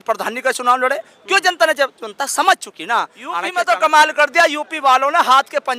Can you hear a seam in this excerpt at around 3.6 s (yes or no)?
yes